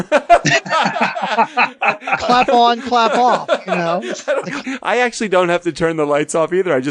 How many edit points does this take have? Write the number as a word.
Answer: one